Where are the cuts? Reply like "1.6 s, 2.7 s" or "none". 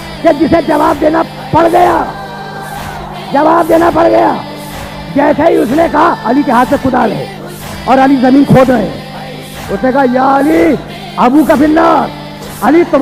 none